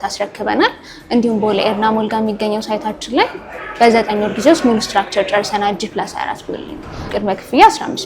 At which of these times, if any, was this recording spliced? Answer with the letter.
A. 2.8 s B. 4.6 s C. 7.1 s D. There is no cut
C